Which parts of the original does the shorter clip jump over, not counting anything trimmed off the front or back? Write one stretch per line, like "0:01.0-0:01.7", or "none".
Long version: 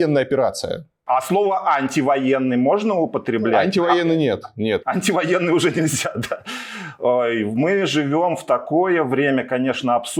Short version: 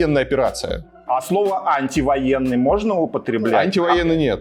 none